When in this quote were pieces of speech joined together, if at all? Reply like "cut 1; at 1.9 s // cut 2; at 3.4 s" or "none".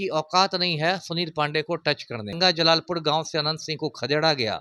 cut 1; at 2.4 s